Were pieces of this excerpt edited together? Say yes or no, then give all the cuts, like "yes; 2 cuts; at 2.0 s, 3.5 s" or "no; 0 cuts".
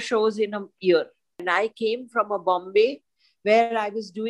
yes; 1 cut; at 1.4 s